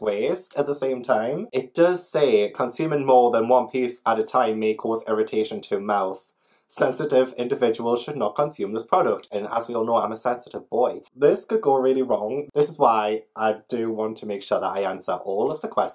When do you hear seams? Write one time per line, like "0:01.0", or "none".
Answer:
none